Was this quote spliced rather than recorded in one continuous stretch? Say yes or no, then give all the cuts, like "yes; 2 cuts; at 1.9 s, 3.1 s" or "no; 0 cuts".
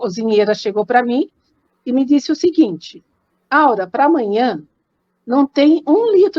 no; 0 cuts